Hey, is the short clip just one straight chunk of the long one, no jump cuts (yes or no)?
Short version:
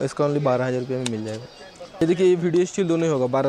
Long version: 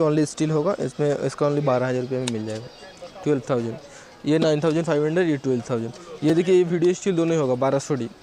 no